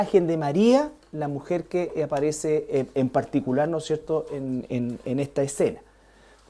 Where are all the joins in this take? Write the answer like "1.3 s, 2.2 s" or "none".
4.0 s